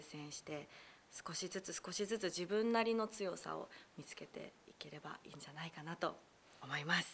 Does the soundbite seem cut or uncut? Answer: uncut